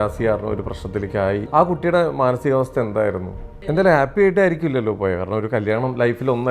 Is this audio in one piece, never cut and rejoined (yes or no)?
no